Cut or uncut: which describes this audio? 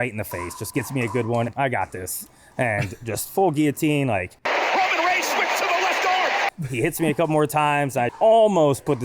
cut